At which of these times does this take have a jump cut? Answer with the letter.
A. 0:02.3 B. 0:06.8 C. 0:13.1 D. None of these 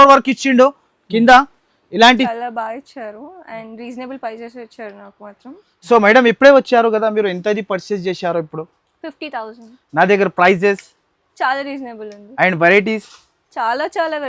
A